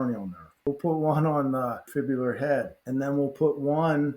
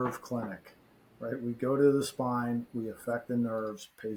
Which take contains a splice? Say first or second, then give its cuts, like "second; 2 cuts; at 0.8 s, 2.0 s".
first; 3 cuts; at 0.7 s, 1.9 s, 2.8 s